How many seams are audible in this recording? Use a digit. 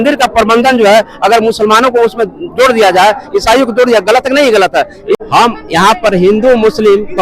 1